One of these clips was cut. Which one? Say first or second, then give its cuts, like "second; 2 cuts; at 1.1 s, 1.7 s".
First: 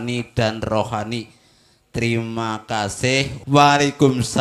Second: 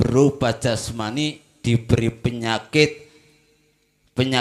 first; 1 cut; at 3.3 s